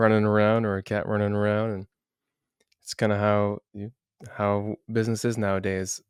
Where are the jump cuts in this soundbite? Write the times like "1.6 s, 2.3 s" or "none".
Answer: none